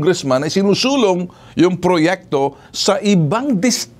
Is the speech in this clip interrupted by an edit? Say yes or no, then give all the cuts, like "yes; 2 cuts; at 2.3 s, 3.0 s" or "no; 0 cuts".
no; 0 cuts